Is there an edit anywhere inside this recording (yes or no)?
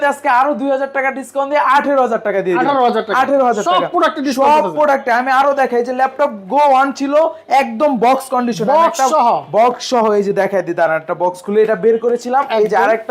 no